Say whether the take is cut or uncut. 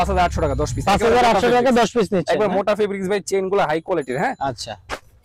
uncut